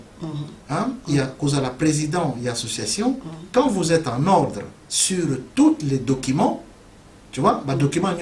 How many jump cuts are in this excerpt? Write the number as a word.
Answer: zero